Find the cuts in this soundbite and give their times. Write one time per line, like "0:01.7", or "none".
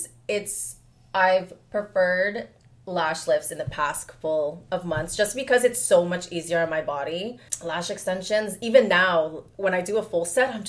0:07.5